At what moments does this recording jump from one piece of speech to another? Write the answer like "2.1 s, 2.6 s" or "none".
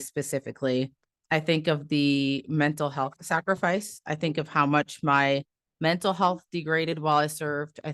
3.2 s